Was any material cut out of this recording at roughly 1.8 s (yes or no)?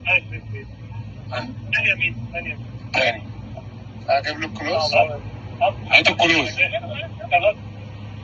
yes